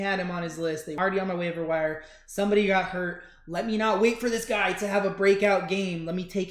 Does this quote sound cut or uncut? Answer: cut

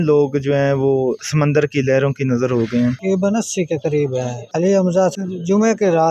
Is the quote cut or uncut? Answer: cut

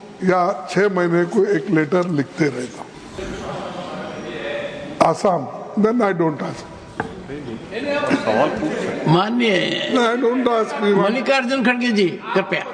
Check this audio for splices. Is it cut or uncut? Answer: cut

